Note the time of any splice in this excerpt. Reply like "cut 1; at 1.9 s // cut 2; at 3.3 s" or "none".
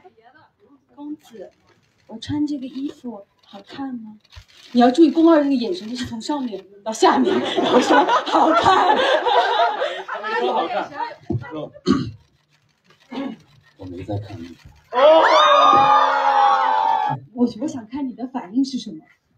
cut 1; at 17.1 s

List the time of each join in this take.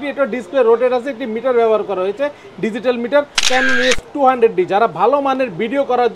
cut 1; at 3.5 s

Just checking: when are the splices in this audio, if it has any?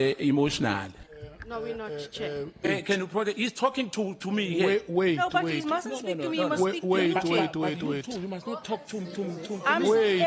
cut 1; at 2.7 s

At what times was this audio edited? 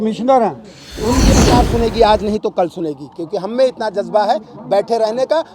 cut 1; at 1.3 s

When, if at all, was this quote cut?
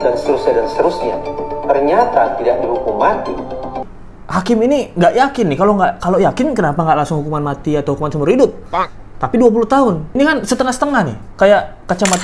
cut 1; at 3.8 s

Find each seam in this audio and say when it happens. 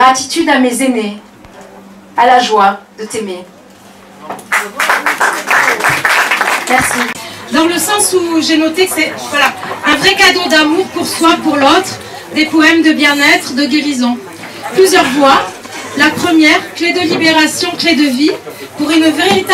cut 1; at 7.1 s

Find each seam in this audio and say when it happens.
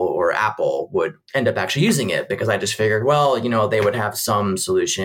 none

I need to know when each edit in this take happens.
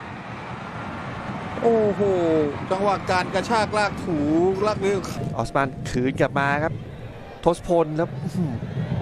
cut 1; at 5.2 s

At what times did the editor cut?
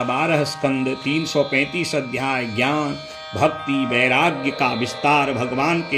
none

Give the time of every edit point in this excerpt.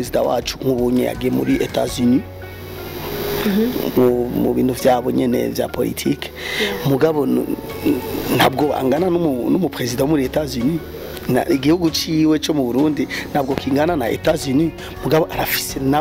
none

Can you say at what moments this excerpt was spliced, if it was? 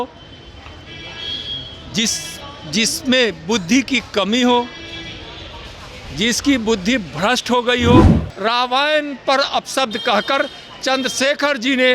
cut 1; at 8.2 s

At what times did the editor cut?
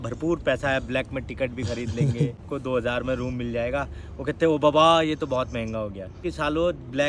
cut 1; at 2.5 s // cut 2; at 6.2 s

